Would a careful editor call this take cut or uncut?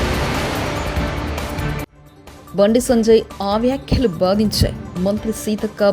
uncut